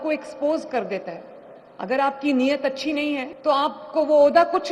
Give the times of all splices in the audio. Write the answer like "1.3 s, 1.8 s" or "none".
3.3 s

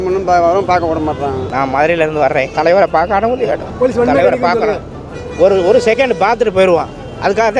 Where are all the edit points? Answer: 1.4 s, 2.5 s, 3.7 s

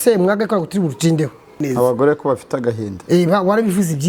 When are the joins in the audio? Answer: 1.5 s

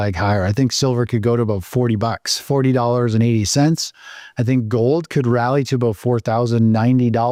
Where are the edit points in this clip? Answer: none

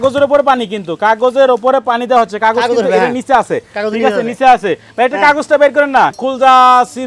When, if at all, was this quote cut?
6.2 s

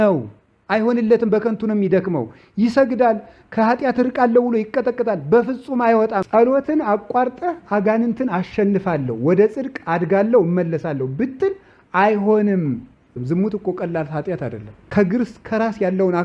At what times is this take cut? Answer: 6.3 s, 13.2 s, 14.7 s

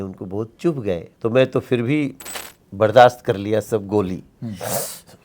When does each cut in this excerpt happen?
1.1 s

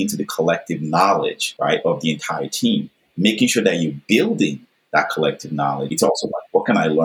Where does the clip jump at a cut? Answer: 1.4 s, 5.9 s

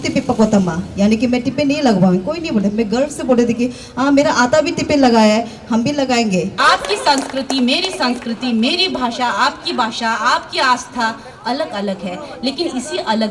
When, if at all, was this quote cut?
6.6 s

